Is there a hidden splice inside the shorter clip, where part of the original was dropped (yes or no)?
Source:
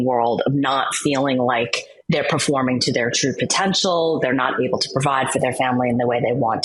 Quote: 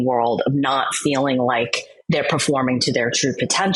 no